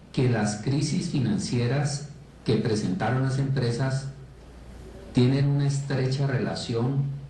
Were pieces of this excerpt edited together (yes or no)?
yes